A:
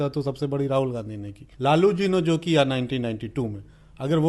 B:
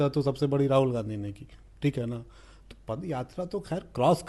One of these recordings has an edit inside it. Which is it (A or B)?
A